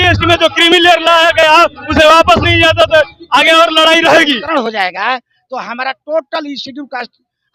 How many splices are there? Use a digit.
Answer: 1